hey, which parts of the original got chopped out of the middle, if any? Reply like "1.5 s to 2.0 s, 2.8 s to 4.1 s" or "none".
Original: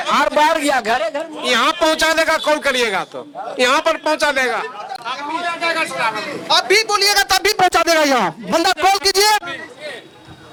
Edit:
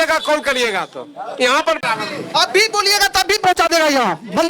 4.0 s to 6.0 s